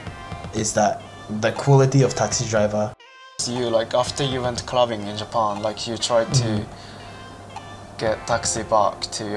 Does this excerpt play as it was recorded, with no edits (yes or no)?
no